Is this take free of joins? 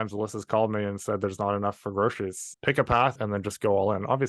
no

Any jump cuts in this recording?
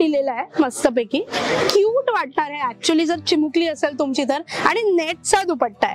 no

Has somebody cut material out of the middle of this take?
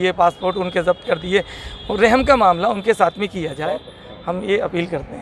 no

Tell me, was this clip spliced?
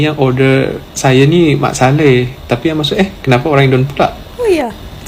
no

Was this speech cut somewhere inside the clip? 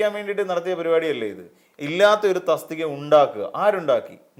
no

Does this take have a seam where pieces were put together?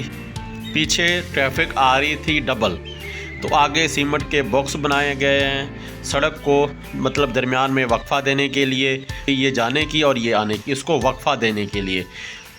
yes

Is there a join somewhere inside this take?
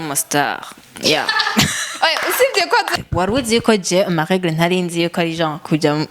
yes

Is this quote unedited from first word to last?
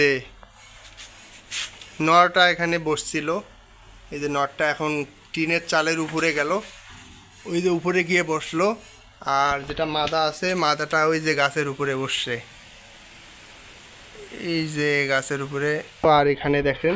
no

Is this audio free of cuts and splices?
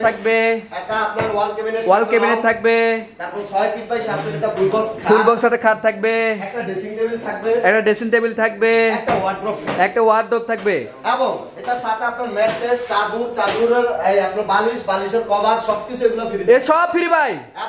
yes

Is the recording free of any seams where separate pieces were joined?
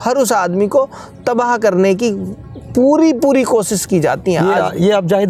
yes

